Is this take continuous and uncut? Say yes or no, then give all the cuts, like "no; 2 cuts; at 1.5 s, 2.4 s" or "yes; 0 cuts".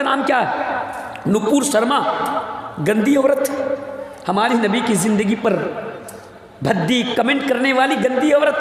yes; 0 cuts